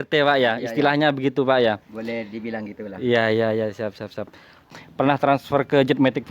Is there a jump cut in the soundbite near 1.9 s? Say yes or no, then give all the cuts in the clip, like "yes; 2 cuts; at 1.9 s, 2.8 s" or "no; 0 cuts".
no; 1 cut; at 4.7 s